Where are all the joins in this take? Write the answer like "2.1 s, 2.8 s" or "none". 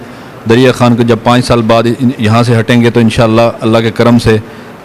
none